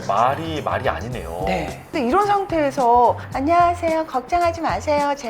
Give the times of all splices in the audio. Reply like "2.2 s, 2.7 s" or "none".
1.9 s